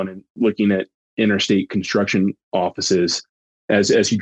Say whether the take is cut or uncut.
cut